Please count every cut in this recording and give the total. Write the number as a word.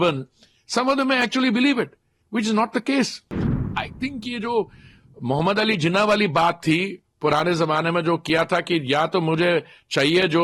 one